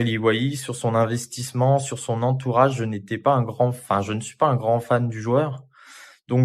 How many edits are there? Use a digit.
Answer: 0